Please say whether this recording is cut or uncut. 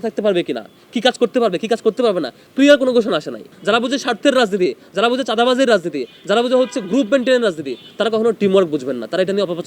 cut